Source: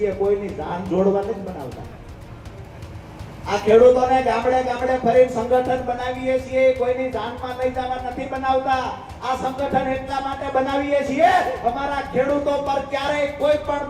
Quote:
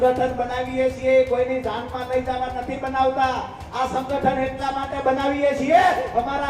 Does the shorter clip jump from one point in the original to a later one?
no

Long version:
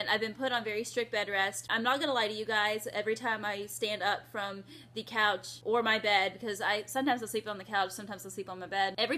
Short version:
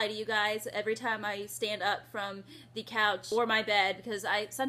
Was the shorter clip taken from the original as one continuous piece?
no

